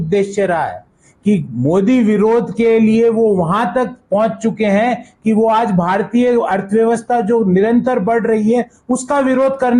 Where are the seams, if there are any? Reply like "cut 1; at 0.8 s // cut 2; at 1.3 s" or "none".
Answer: none